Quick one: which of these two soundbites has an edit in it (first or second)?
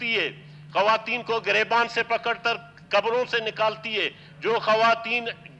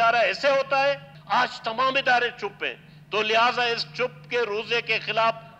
second